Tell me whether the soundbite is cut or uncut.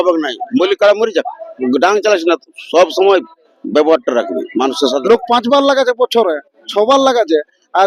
cut